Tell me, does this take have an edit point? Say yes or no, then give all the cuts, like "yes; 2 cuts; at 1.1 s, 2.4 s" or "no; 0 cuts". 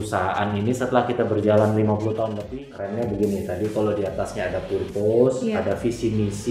yes; 1 cut; at 2.4 s